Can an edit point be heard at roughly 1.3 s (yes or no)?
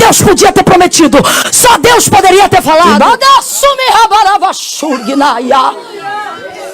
no